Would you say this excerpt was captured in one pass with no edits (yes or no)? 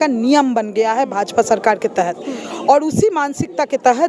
yes